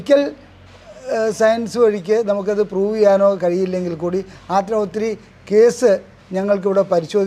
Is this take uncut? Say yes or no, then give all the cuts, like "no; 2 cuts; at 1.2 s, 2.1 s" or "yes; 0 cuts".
yes; 0 cuts